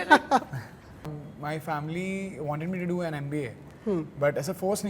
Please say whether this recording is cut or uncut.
cut